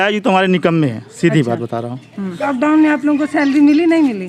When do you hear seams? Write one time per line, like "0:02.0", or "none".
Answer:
0:02.5